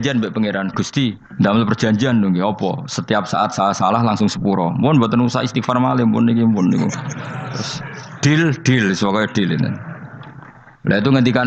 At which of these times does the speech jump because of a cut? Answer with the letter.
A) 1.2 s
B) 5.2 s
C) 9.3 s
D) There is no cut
A